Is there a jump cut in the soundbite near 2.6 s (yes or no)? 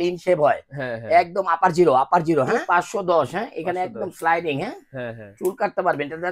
yes